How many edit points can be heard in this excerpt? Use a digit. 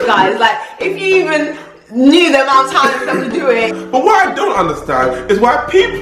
1